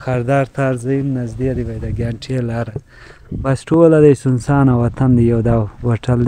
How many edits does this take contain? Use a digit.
0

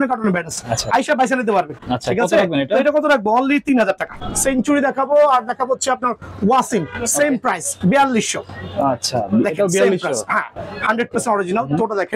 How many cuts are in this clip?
2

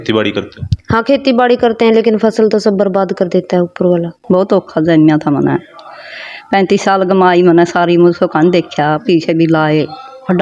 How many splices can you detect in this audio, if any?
1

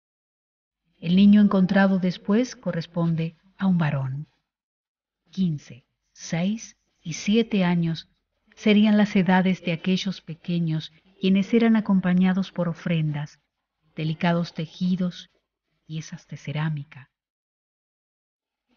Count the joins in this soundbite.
1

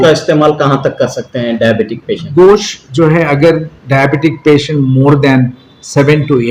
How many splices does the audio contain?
0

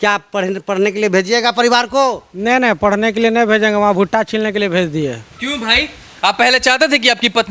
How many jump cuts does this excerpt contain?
0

